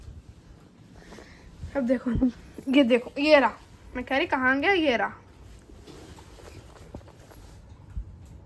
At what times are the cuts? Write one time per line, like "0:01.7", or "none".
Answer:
none